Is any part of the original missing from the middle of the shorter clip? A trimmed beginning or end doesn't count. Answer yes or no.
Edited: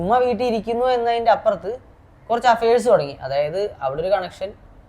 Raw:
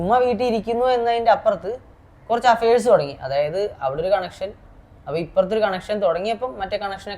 no